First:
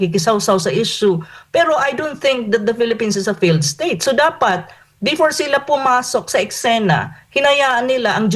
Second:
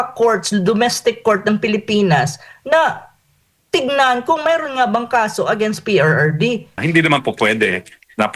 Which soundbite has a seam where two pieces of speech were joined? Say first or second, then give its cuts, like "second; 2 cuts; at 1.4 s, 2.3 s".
second; 1 cut; at 6.8 s